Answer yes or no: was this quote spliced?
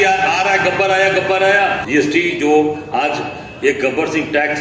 yes